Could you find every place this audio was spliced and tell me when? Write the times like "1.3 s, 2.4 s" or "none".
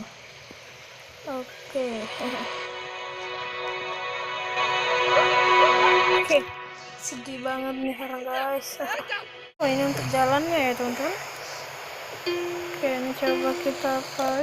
9.6 s